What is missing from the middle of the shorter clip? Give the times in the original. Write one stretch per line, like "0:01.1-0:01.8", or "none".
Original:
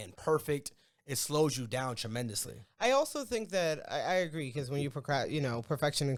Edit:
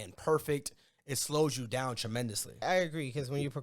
0:02.6-0:04.0